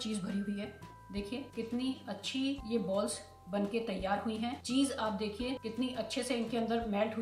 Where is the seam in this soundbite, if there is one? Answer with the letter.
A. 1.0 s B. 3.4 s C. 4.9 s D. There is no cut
A